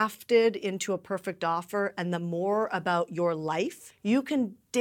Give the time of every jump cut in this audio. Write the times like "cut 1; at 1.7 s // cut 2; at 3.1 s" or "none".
cut 1; at 3.9 s